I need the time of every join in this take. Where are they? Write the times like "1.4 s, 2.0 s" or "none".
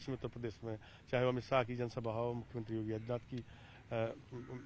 none